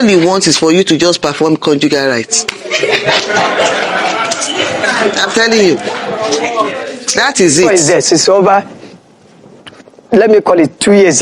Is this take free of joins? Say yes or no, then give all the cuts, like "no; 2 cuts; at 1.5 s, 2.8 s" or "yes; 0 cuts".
no; 1 cut; at 7.9 s